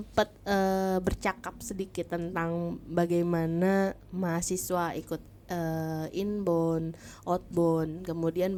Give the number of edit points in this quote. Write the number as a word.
zero